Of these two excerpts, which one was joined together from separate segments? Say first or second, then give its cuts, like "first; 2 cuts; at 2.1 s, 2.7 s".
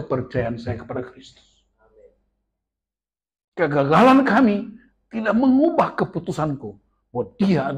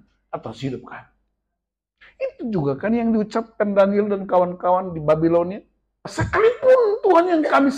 second; 1 cut; at 6.1 s